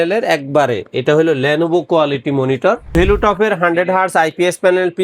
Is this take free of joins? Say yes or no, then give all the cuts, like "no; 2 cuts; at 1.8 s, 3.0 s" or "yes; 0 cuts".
no; 1 cut; at 2.9 s